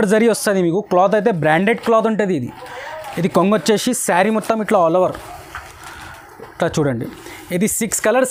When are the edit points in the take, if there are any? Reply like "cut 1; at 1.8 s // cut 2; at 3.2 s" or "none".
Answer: none

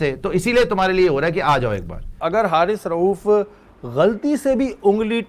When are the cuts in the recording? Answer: cut 1; at 2.1 s

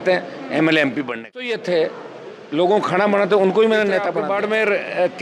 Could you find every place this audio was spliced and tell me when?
cut 1; at 1.6 s // cut 2; at 4.0 s

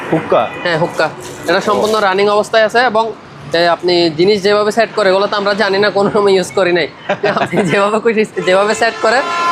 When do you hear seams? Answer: none

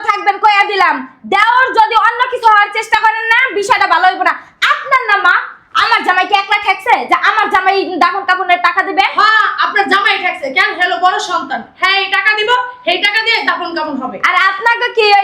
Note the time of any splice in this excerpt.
none

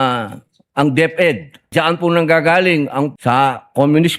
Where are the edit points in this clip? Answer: cut 1; at 1.7 s // cut 2; at 3.1 s

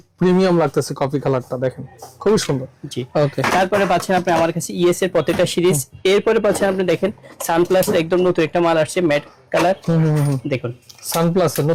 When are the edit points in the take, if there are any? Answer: none

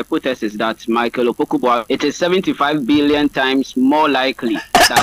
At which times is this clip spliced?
cut 1; at 1.8 s

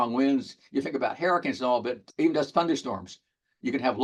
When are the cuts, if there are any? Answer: none

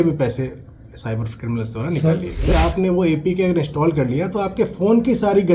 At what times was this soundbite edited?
cut 1; at 2.5 s

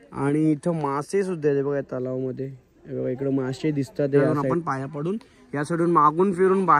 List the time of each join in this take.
cut 1; at 4.4 s

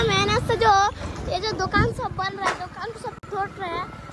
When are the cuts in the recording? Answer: none

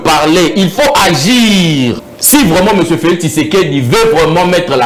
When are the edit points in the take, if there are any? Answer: cut 1; at 2.1 s

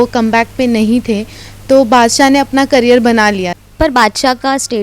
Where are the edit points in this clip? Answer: cut 1; at 3.6 s

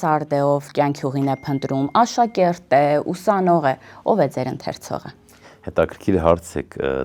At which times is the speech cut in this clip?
none

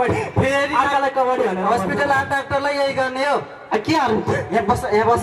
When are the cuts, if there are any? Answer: none

